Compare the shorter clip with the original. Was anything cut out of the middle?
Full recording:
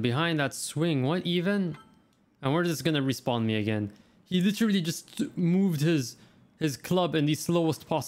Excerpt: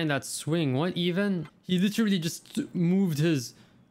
yes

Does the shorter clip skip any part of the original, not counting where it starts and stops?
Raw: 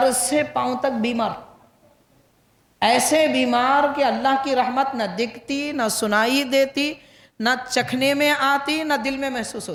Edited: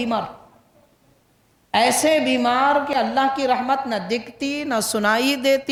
no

